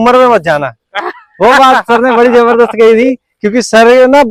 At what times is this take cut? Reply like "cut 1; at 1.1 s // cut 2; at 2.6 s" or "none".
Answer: none